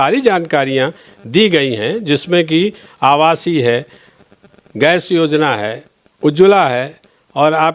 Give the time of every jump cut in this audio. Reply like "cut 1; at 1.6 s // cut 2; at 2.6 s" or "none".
none